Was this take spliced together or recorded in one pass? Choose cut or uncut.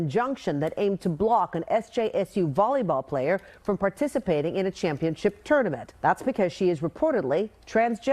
cut